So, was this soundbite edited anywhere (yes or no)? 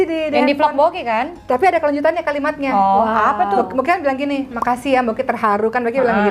no